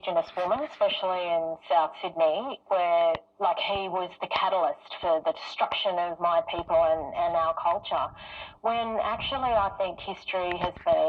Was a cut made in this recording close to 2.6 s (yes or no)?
yes